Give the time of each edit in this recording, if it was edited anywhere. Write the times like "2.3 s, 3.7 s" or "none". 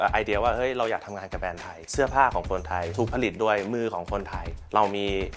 none